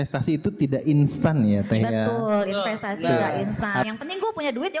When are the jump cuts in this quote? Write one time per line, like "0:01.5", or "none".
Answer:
0:03.5

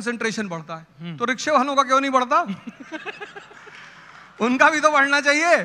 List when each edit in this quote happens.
none

